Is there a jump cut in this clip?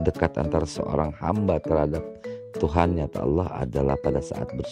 no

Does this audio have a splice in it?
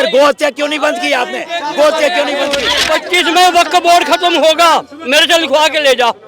yes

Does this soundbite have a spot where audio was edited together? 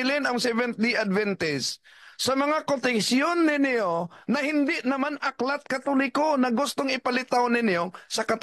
no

